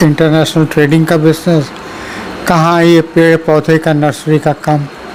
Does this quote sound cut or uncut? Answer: uncut